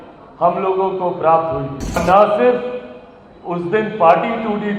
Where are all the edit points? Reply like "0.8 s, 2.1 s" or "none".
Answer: 2.0 s